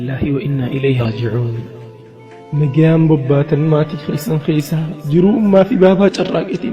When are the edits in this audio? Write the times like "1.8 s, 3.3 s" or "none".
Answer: 1.0 s